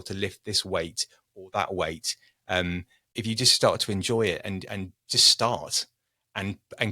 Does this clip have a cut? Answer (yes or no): yes